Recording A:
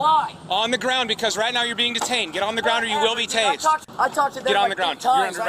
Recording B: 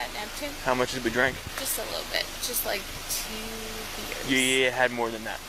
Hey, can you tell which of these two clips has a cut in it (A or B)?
A